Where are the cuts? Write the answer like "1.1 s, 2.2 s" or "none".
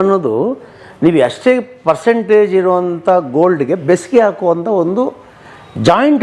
none

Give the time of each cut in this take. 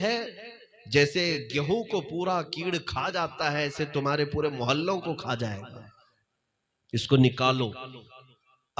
none

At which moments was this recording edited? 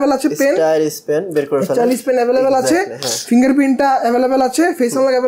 none

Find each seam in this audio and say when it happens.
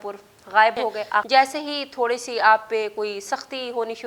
1.3 s

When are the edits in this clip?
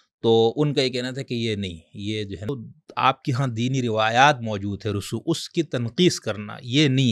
2.5 s

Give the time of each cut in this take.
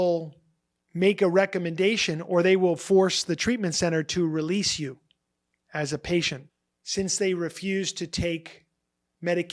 6.4 s

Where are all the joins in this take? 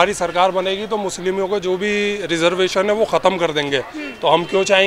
none

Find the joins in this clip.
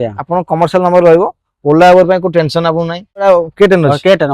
3.2 s

